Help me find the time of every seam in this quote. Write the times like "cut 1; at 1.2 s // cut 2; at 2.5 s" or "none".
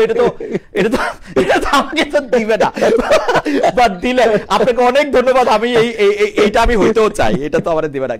none